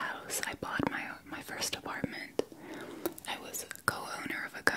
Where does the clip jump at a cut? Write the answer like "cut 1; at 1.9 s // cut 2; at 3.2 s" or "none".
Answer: none